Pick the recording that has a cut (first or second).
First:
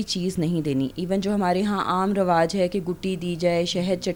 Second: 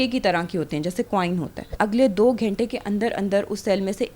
second